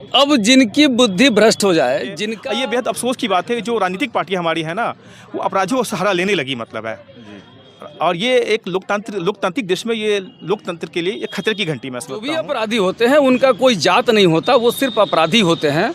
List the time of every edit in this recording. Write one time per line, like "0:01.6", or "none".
0:02.1
0:12.4

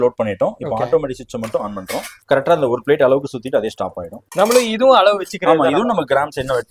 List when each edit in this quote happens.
none

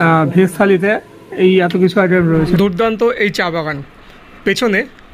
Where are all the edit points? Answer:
0:02.3

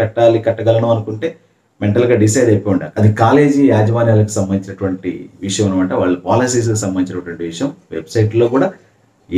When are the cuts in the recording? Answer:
0:02.9

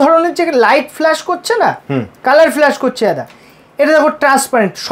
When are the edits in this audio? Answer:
none

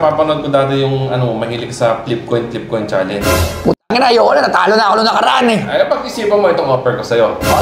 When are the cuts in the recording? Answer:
none

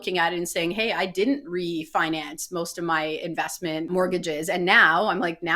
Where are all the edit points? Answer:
0:03.9

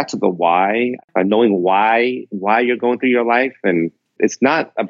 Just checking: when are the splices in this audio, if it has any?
0:01.0
0:04.2

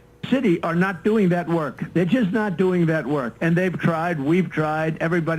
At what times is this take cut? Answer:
none

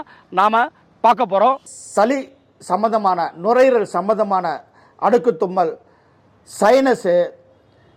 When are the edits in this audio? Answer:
0:01.7

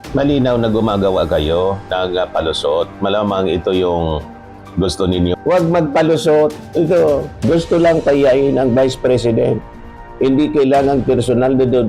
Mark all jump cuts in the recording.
0:05.3

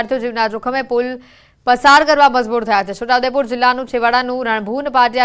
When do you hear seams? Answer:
0:03.2

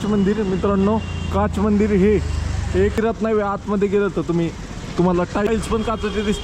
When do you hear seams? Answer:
0:03.0
0:05.5

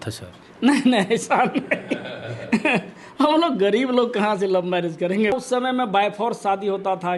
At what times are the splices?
0:05.3

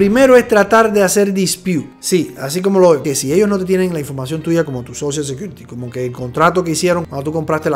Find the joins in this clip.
0:03.0

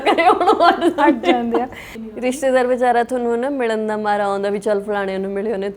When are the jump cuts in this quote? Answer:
0:01.9

